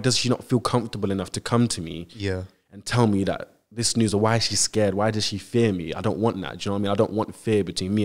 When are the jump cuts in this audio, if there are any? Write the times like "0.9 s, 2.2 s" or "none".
none